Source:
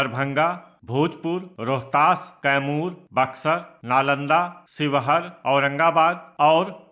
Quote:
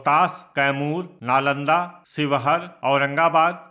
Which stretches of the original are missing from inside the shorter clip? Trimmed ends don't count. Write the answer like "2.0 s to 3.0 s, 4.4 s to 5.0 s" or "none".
3.0 s to 3.8 s